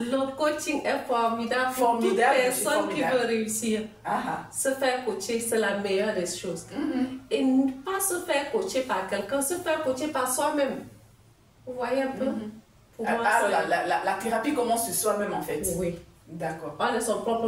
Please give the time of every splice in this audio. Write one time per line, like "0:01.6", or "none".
none